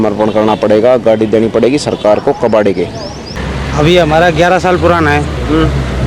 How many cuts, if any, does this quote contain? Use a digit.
1